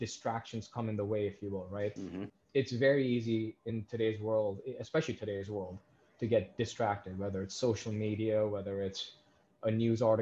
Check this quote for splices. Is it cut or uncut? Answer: uncut